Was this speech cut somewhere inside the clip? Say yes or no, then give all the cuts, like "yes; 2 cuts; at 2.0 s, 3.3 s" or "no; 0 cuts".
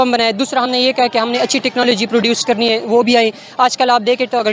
no; 0 cuts